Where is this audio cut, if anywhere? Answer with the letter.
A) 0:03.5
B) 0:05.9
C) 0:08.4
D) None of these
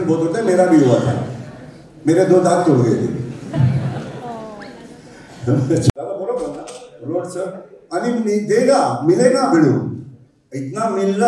B